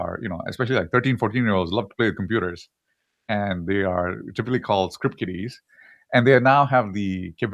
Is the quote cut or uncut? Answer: cut